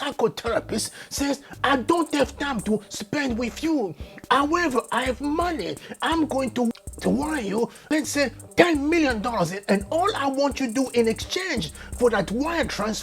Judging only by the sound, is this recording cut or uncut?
cut